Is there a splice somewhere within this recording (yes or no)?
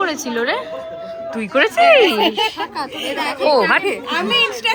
no